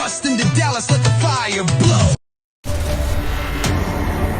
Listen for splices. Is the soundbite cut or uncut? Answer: cut